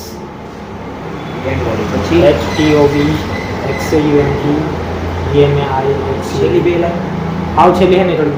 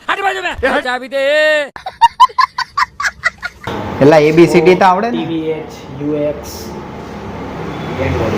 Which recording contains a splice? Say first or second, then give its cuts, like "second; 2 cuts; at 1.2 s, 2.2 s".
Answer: second; 3 cuts; at 0.9 s, 1.8 s, 3.6 s